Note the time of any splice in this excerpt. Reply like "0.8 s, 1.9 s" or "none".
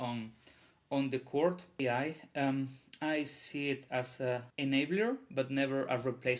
1.8 s, 4.5 s